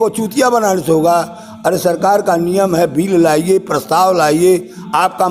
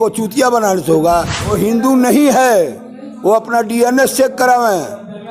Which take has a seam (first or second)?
second